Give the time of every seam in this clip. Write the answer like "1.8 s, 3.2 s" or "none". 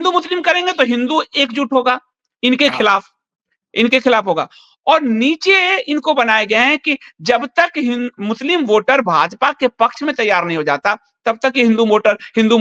none